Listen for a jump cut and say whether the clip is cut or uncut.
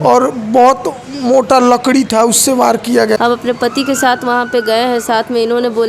cut